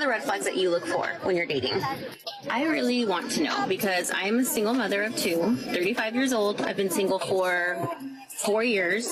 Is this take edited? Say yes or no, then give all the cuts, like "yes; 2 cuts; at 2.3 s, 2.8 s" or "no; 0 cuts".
no; 0 cuts